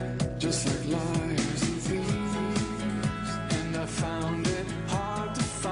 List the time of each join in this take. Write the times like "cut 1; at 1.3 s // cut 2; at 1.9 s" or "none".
none